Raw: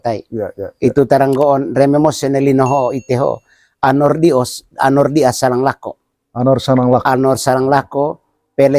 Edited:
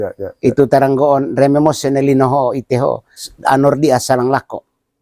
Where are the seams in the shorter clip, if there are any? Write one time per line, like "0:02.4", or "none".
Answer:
0:03.3

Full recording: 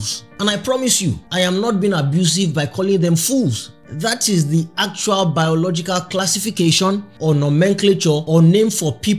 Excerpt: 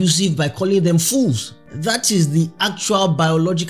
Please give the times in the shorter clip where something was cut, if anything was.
none

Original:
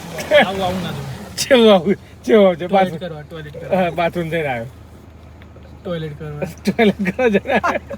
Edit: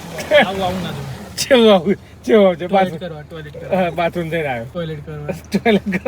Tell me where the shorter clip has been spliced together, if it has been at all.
0:04.7

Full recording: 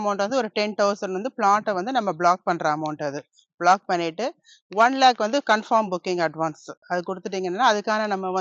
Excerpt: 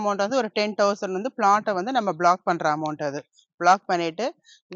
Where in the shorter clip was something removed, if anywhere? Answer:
none

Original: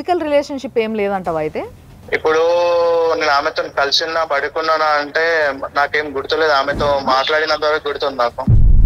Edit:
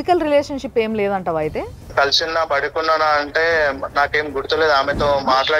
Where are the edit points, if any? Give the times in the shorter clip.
0:01.8

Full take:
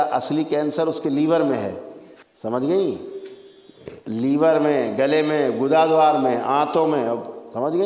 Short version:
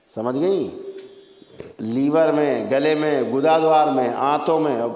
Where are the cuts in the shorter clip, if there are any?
none

